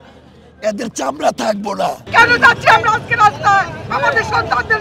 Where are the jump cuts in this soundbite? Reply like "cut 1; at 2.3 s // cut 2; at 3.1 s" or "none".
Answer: cut 1; at 2.0 s

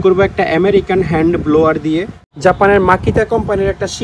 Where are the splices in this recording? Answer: cut 1; at 2.2 s

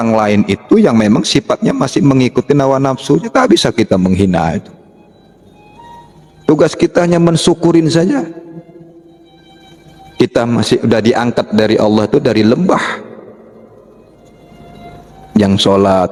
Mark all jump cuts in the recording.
none

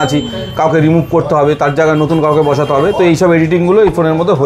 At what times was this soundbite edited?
none

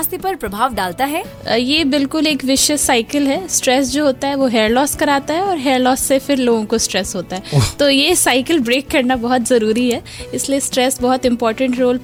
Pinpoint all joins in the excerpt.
none

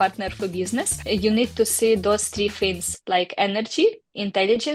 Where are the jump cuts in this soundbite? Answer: none

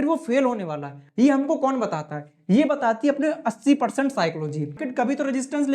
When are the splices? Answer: cut 1; at 4.8 s

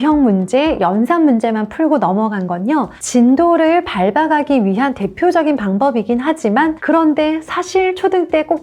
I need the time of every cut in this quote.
cut 1; at 6.8 s

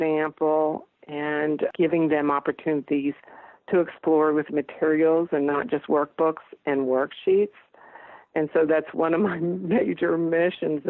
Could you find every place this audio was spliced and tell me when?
cut 1; at 1.7 s

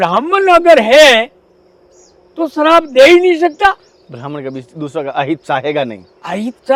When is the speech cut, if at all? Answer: none

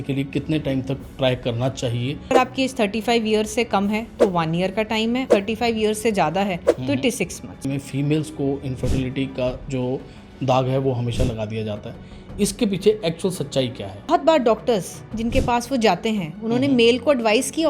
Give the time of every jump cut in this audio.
cut 1; at 2.3 s // cut 2; at 5.3 s // cut 3; at 7.6 s // cut 4; at 14.1 s

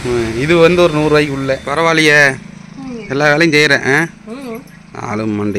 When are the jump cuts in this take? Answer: cut 1; at 1.7 s

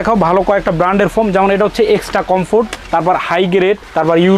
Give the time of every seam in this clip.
none

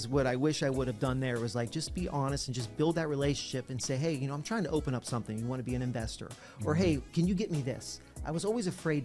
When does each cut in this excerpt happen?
none

